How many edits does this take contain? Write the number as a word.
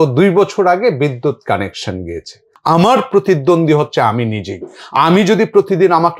one